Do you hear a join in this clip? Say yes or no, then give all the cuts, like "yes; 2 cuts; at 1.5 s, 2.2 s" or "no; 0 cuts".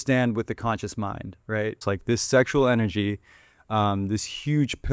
yes; 1 cut; at 1.9 s